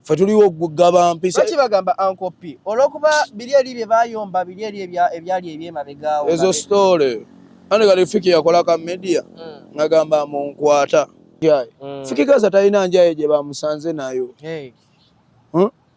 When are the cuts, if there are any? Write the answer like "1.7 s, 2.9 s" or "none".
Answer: 11.4 s